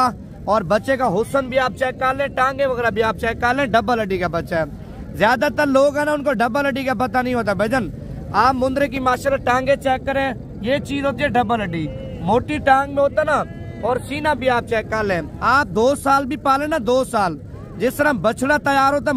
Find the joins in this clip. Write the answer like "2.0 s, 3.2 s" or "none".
none